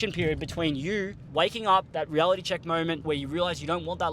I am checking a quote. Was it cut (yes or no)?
yes